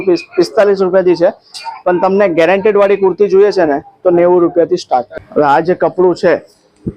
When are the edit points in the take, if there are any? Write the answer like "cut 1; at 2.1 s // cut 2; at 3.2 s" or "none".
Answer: cut 1; at 5.2 s